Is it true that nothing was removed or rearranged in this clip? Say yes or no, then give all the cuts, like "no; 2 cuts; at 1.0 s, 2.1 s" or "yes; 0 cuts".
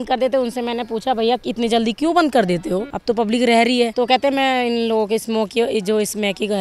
no; 2 cuts; at 2.9 s, 3.9 s